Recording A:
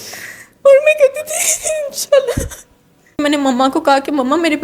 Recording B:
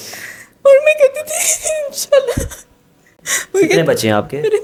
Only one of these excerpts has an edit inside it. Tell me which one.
A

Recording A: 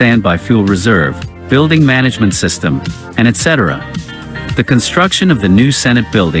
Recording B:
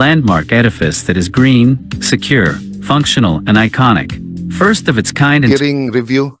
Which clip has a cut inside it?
B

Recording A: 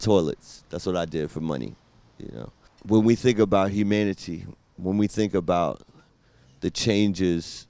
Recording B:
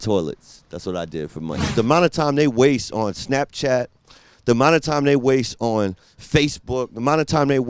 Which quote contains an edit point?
B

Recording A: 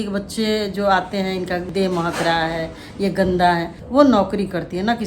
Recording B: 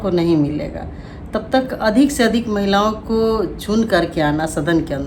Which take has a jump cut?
A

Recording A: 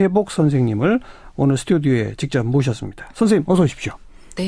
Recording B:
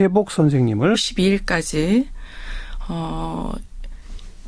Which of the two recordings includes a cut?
A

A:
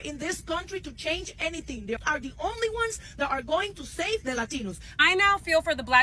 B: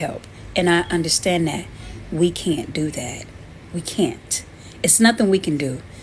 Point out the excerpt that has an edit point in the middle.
A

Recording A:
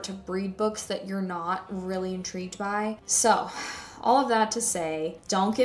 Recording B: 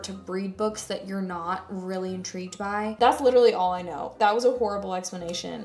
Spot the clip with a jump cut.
B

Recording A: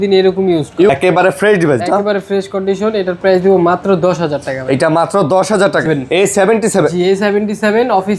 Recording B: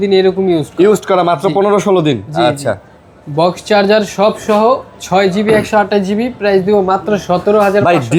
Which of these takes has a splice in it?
A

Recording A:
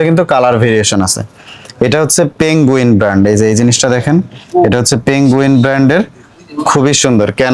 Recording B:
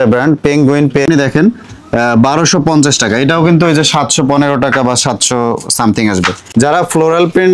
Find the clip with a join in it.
B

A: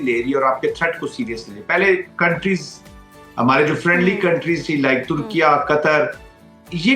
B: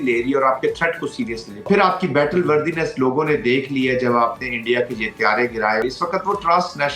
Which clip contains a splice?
B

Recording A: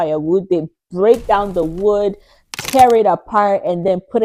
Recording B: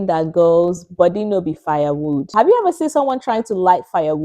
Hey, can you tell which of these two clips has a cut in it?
B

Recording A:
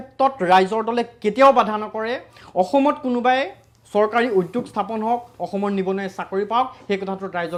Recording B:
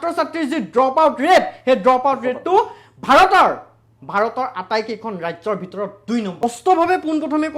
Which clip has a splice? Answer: B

